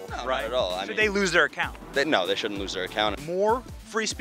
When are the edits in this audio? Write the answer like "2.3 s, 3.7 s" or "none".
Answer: 3.2 s